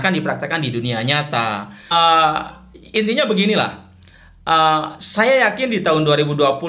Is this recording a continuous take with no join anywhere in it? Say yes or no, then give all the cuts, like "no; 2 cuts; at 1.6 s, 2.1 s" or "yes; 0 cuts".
no; 1 cut; at 1.9 s